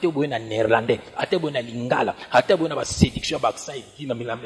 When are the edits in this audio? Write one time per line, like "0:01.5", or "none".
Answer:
none